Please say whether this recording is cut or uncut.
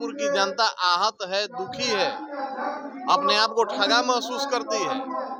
uncut